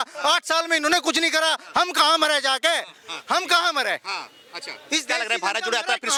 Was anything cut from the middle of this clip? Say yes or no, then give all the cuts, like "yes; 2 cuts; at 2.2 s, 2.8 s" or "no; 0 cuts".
no; 0 cuts